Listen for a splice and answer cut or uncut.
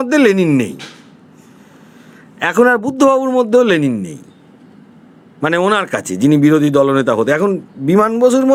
uncut